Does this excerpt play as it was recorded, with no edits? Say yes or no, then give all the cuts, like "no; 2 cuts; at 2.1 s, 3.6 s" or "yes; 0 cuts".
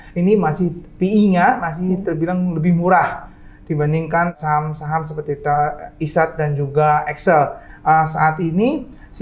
no; 2 cuts; at 4.3 s, 7.7 s